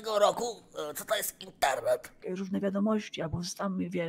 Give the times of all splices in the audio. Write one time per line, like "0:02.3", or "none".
0:02.2